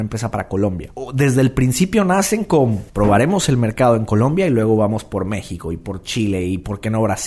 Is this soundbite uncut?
no; 2 cuts; at 0.9 s, 2.8 s

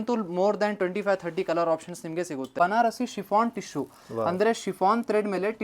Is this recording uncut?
no; 1 cut; at 2.4 s

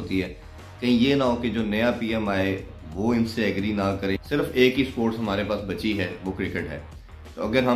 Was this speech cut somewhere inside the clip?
yes; 1 cut; at 4.2 s

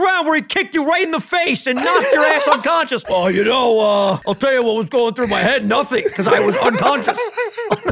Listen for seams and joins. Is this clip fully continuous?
no; 2 cuts; at 3.1 s, 4.3 s

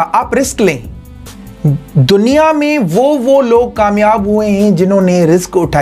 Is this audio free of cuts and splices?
yes; 0 cuts

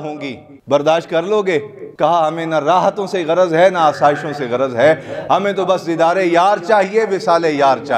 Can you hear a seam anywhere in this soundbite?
yes; 1 cut; at 1.8 s

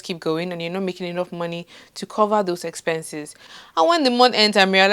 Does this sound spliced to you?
yes; 1 cut; at 3.3 s

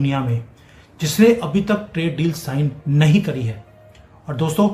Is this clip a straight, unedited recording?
yes; 0 cuts

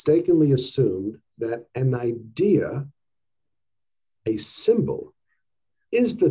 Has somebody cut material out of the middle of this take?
no; 0 cuts

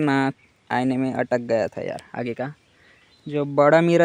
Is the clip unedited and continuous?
yes; 0 cuts

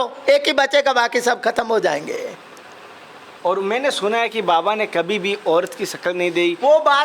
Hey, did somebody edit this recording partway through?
yes; 1 cut; at 3.2 s

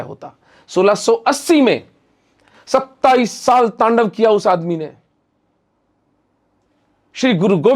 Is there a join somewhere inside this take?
no; 0 cuts

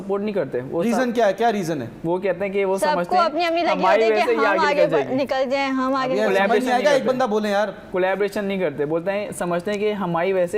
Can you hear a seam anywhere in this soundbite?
no; 0 cuts

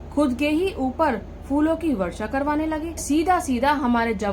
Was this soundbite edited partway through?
yes; 1 cut; at 3.0 s

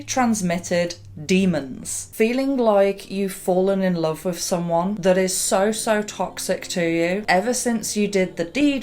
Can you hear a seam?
yes; 2 cuts; at 2.0 s, 7.2 s

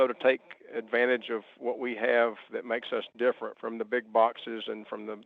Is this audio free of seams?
no; 1 cut; at 3.5 s

